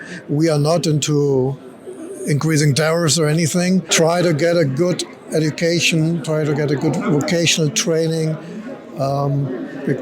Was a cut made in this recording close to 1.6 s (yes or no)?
no